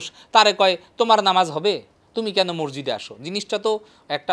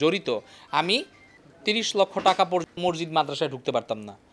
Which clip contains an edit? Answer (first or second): second